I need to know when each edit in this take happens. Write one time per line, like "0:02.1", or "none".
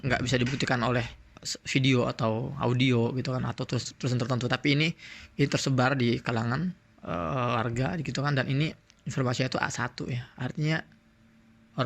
none